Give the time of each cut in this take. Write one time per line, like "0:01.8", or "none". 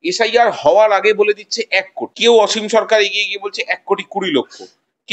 0:02.0